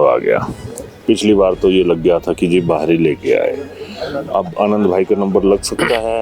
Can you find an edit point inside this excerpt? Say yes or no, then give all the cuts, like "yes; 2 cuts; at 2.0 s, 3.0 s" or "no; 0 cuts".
no; 0 cuts